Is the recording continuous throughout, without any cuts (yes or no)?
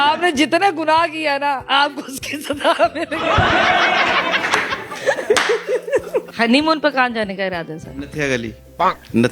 no